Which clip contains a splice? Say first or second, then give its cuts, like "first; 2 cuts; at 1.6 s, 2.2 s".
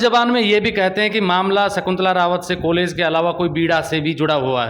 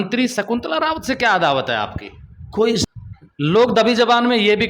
second; 1 cut; at 2.9 s